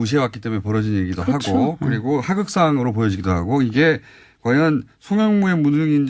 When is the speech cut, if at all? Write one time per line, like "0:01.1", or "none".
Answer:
none

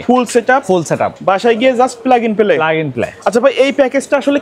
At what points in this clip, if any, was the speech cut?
none

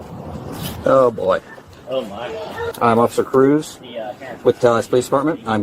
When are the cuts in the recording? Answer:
0:02.7

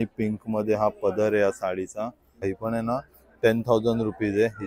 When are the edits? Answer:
0:02.4

